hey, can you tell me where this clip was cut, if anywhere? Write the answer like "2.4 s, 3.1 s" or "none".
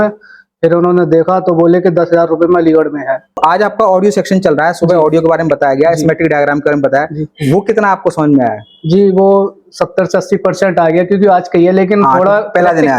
3.3 s